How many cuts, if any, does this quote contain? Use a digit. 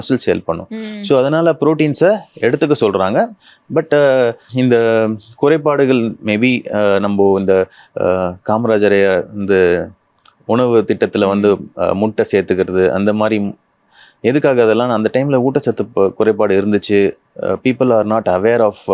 0